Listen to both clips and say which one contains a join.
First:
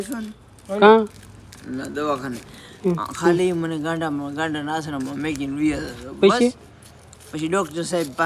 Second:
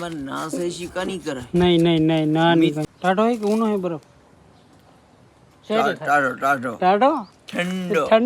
second; 1 cut; at 2.8 s

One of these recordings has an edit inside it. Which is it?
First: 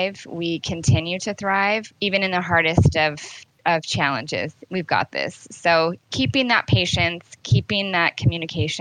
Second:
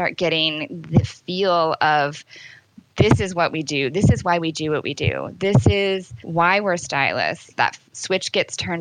second; 2 cuts; at 6.2 s, 7.5 s

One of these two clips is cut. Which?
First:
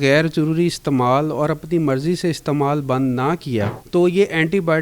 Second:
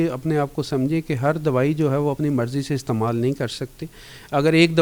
first; 1 cut; at 3.8 s

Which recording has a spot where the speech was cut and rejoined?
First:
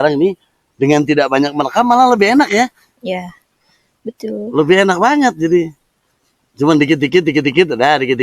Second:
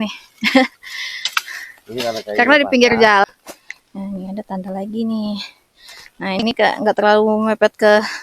second; 1 cut; at 3.2 s

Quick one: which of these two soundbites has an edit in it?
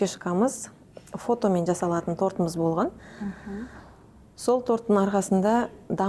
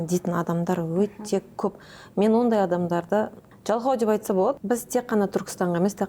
second; 2 cuts; at 3.5 s, 4.6 s

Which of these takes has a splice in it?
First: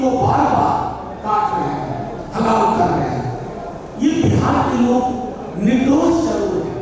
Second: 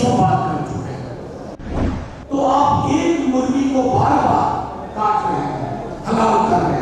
second; 1 cut; at 1.6 s

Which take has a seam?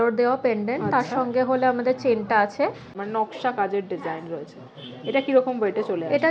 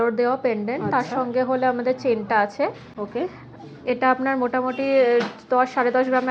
first; 1 cut; at 3.0 s

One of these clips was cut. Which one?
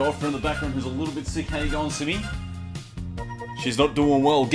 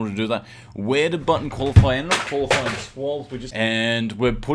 second; 1 cut; at 3.4 s

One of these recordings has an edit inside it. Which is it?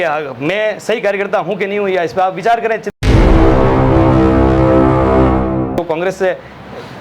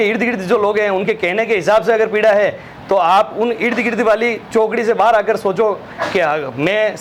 first; 2 cuts; at 2.9 s, 5.8 s

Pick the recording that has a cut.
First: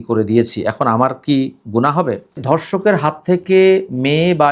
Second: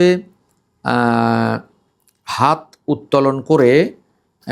first; 1 cut; at 2.4 s

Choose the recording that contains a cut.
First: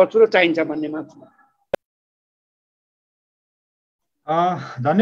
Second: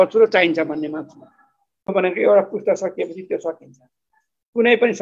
second; 1 cut; at 1.9 s

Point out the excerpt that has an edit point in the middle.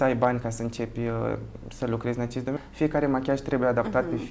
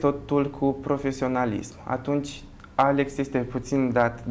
first; 1 cut; at 2.6 s

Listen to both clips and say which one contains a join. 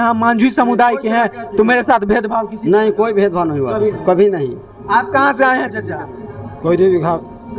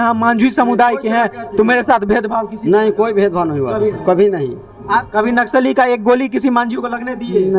second; 1 cut; at 5.1 s

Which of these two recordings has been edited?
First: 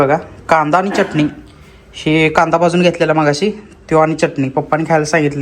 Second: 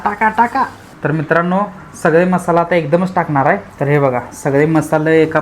second; 2 cuts; at 0.9 s, 3.7 s

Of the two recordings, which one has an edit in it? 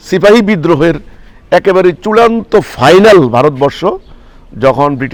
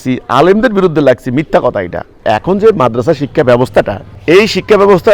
second; 2 cuts; at 2.2 s, 4.1 s

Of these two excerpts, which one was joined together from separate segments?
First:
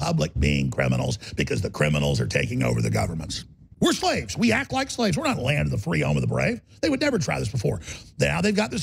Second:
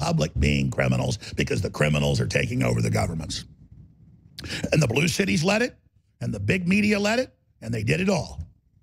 first; 1 cut; at 4.0 s

